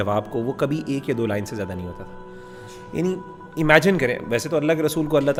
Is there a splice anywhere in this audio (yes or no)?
no